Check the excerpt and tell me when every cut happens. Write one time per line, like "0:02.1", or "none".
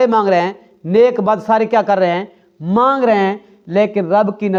none